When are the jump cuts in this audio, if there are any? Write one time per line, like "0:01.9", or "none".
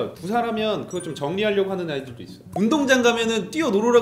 0:02.4

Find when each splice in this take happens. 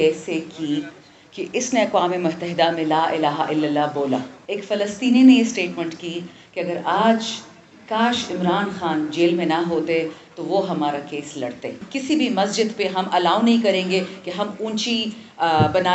0:04.3
0:11.8

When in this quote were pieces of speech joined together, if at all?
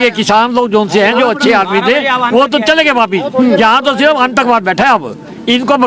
none

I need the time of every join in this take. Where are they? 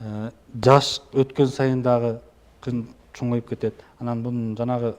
0:03.9

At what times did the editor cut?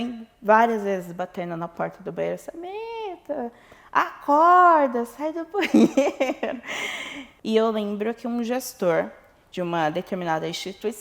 0:07.3

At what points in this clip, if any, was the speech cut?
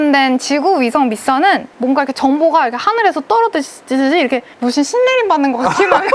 0:01.7
0:04.5

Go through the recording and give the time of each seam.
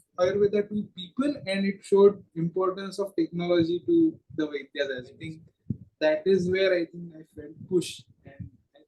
none

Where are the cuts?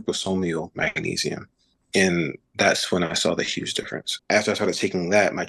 0:04.1

